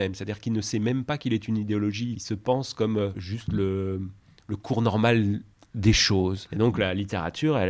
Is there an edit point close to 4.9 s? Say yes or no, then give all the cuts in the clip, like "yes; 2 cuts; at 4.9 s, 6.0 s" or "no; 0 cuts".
no; 3 cuts; at 2.3 s, 3.3 s, 6.4 s